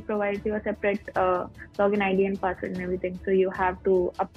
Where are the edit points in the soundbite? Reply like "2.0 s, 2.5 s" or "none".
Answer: none